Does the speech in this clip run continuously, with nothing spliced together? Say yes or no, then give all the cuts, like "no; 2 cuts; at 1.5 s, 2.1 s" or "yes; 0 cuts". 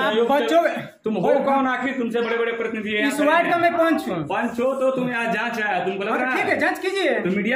yes; 0 cuts